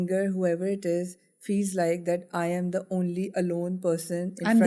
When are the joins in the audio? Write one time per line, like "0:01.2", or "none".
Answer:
none